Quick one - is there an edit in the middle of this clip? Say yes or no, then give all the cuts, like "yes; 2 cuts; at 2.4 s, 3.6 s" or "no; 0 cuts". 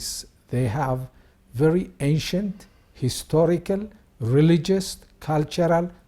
no; 0 cuts